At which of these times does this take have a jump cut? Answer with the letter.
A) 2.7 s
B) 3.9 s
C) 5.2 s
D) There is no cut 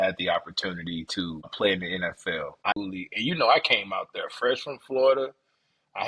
A